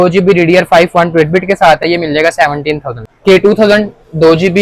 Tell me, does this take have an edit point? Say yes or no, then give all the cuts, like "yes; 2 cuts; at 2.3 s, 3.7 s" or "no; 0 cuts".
yes; 1 cut; at 3.1 s